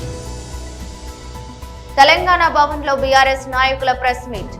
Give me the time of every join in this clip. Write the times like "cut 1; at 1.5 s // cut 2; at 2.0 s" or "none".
cut 1; at 1.6 s